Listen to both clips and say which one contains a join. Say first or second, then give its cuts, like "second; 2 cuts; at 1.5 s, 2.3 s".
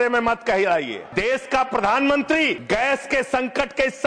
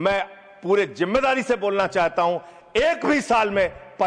first; 2 cuts; at 1.0 s, 2.6 s